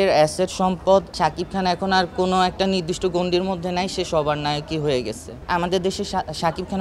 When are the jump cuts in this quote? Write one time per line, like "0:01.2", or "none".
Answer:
0:01.1
0:05.4

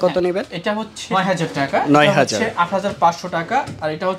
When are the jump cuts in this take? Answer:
0:01.0

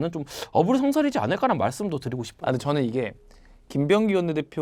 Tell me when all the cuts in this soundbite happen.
none

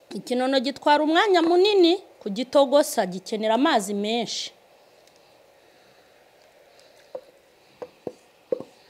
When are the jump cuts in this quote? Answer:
none

